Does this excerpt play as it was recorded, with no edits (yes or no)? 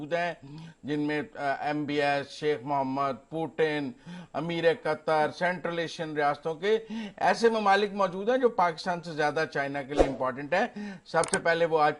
yes